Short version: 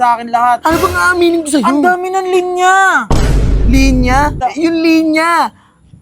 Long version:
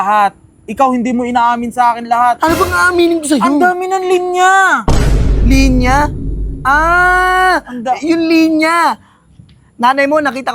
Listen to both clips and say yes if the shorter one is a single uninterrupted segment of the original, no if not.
no